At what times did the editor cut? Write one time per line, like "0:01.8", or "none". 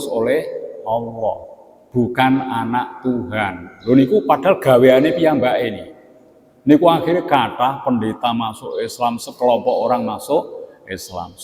none